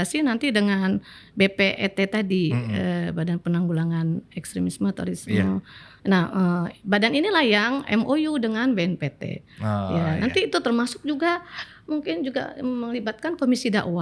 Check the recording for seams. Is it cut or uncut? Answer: uncut